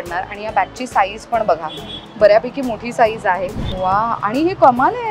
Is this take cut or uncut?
cut